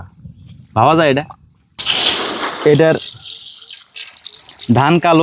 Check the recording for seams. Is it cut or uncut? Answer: uncut